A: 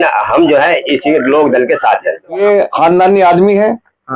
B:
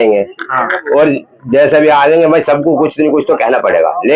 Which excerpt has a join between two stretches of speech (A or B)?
A